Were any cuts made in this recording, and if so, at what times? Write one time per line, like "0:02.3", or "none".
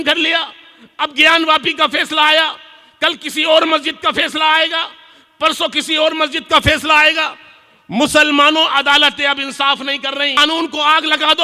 0:10.4